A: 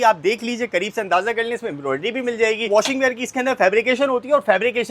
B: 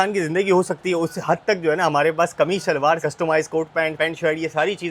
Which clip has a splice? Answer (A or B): A